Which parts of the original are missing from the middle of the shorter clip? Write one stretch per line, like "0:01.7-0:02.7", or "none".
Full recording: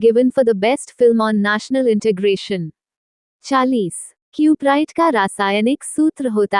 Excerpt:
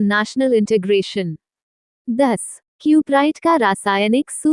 0:03.5-0:03.7